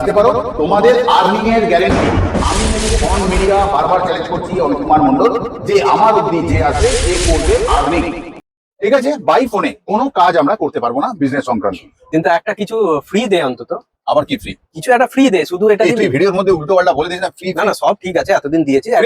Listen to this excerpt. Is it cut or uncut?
cut